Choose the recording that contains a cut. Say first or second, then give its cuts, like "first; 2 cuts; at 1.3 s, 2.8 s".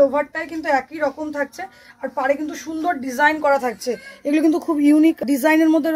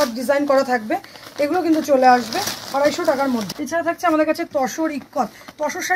second; 1 cut; at 3.5 s